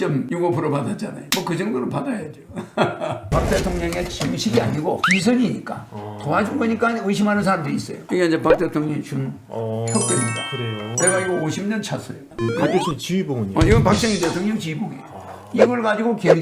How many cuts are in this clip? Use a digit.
3